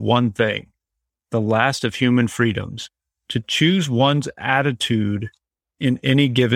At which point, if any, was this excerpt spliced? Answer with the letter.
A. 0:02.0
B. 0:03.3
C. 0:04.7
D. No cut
D